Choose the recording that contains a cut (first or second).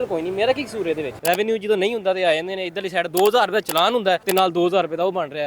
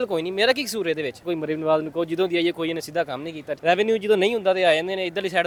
first